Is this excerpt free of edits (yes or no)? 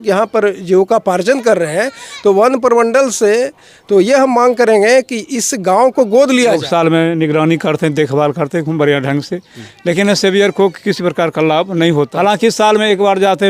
no